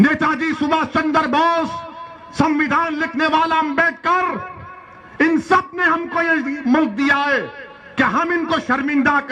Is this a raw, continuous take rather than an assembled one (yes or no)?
yes